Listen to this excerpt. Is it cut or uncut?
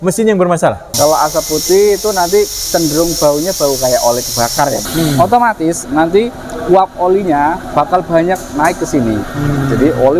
cut